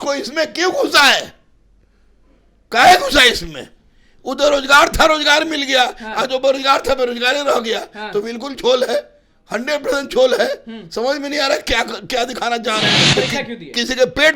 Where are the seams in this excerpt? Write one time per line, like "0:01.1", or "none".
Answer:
0:13.0

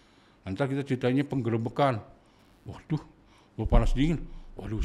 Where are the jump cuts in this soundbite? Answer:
none

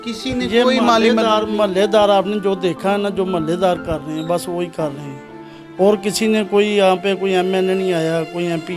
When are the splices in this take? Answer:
none

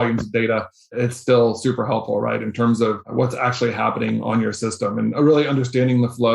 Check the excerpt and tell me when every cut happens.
0:01.0
0:03.1

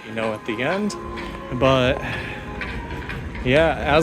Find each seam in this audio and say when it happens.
none

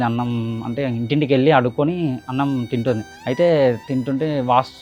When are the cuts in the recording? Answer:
0:03.1

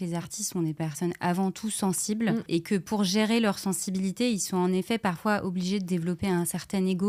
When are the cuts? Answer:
none

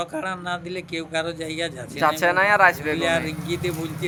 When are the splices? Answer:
none

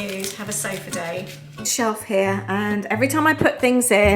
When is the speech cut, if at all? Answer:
0:01.7

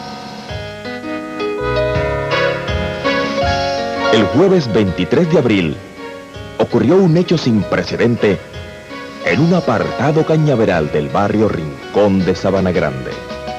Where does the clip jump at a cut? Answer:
none

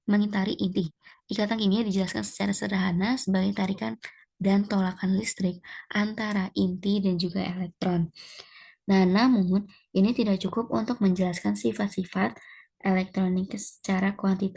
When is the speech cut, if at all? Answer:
none

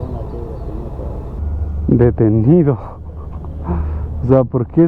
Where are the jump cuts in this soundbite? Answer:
0:01.4

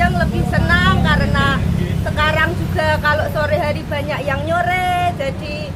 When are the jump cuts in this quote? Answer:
none

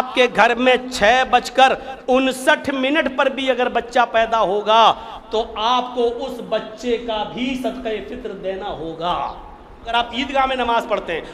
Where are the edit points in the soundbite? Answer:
0:09.9

